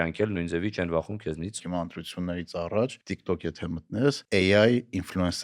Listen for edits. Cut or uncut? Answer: cut